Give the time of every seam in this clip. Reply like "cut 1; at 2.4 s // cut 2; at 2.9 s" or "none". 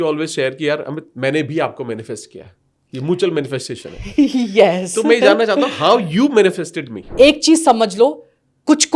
cut 1; at 7.1 s